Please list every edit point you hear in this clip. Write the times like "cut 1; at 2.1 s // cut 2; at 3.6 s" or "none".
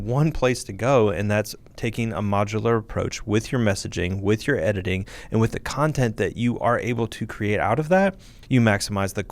cut 1; at 8.3 s